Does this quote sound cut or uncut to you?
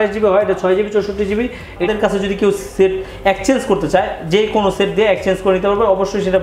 cut